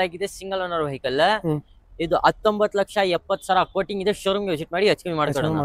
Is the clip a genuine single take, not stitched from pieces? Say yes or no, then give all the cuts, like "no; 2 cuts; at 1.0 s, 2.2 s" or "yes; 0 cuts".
yes; 0 cuts